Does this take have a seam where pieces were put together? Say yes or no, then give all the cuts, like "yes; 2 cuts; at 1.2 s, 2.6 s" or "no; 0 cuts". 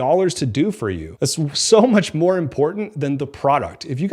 yes; 1 cut; at 1.0 s